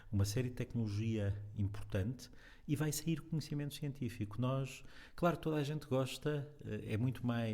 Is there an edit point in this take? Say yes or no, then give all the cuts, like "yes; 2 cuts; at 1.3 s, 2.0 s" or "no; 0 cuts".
no; 0 cuts